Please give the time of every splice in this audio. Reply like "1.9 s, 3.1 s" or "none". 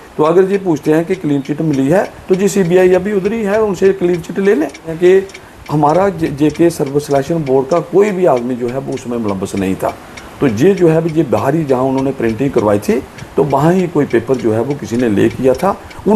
4.9 s